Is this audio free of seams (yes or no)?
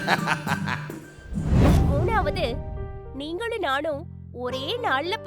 no